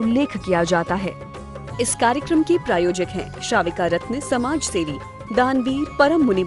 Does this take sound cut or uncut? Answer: cut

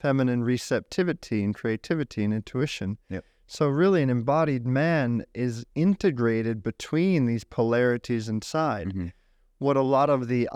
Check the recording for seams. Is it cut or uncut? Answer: uncut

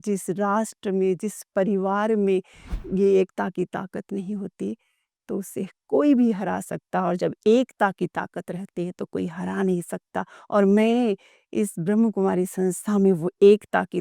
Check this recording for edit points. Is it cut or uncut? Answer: uncut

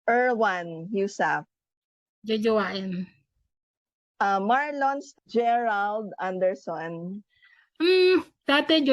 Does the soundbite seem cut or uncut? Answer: cut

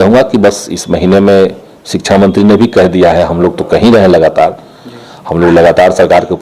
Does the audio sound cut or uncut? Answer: uncut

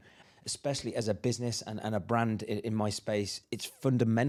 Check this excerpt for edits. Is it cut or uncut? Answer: uncut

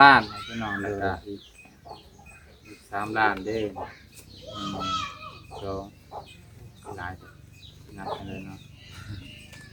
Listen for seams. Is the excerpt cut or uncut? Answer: uncut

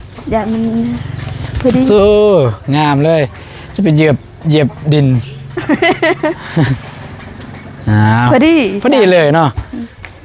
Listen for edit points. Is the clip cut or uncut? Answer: uncut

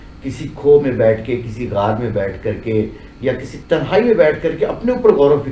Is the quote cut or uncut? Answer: uncut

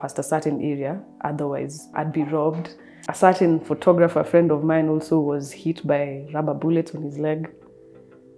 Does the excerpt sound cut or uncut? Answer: cut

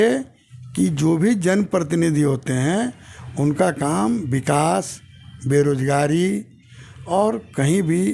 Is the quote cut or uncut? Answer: uncut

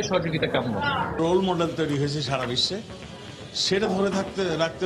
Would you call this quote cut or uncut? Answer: cut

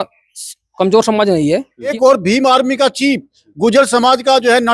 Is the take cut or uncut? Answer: cut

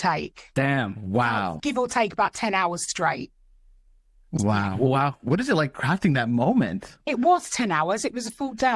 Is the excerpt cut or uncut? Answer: cut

